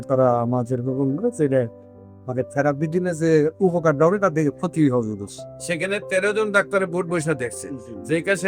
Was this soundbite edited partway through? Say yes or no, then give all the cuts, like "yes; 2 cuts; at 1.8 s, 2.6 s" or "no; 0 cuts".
no; 0 cuts